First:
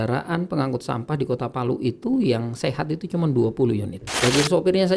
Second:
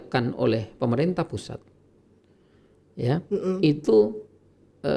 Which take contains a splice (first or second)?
first